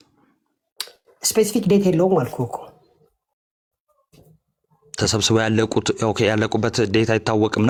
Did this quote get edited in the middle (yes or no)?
no